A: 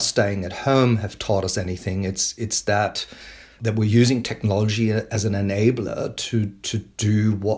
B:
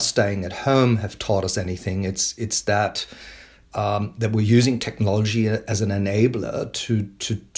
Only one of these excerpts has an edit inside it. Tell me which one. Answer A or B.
A